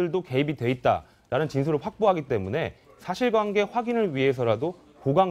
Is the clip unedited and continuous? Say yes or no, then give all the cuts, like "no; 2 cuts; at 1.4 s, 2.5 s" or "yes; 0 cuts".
no; 1 cut; at 3.8 s